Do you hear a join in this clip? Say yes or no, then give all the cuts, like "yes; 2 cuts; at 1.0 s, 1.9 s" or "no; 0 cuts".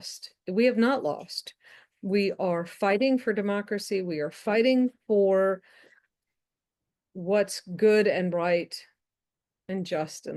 no; 0 cuts